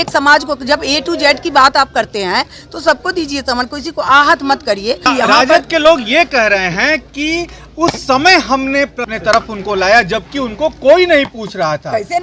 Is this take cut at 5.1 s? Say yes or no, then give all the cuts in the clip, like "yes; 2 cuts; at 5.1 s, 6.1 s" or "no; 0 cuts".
yes; 2 cuts; at 5.1 s, 9.1 s